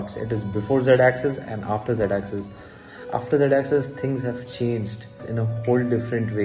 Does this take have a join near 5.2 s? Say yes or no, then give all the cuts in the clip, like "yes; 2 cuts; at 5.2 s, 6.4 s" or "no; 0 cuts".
yes; 1 cut; at 5.2 s